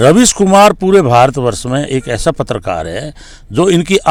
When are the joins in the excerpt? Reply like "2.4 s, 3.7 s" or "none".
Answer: none